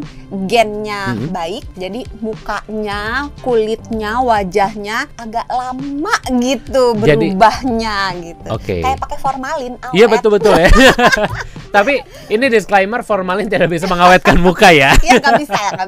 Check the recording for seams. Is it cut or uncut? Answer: uncut